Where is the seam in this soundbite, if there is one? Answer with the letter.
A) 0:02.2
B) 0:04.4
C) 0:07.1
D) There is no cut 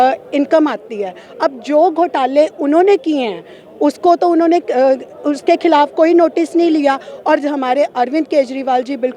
D